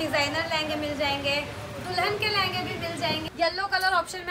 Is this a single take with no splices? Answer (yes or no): no